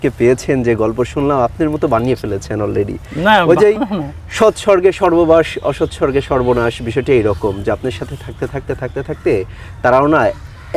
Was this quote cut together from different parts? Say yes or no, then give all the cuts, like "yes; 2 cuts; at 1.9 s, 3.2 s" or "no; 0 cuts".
no; 0 cuts